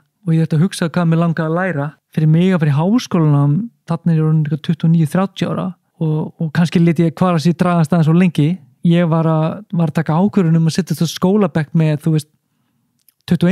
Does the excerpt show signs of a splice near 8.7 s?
yes; 3 cuts; at 2.0 s, 5.8 s, 8.7 s

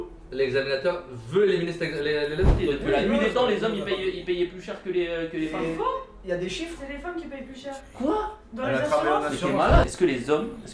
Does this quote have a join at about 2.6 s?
yes; 2 cuts; at 2.6 s, 9.9 s

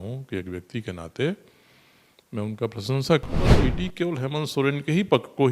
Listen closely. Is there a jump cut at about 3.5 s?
yes; 1 cut; at 3.5 s

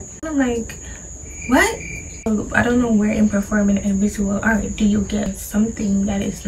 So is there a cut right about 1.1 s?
no; 0 cuts

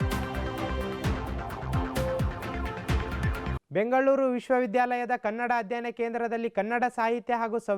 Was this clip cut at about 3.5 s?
no; 0 cuts

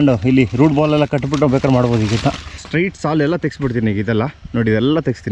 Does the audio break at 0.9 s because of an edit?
no; 1 cut; at 2.5 s

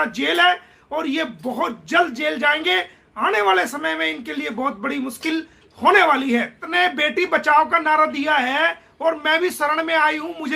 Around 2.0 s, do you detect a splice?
no; 1 cut; at 6.7 s

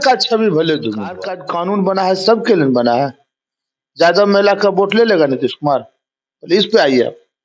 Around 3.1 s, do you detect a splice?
no; 1 cut; at 1.4 s

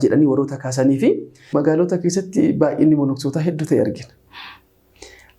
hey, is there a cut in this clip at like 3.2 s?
no; 1 cut; at 1.5 s

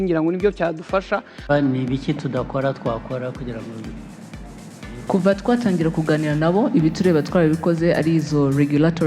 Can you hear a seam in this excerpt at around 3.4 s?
no; 1 cut; at 1.2 s

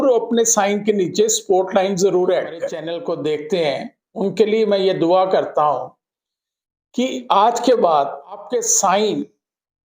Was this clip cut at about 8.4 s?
yes; 2 cuts; at 2.8 s, 8.4 s

